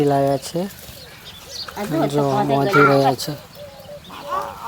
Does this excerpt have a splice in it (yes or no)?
no